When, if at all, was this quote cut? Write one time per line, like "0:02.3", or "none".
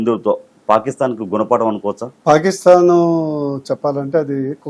0:02.1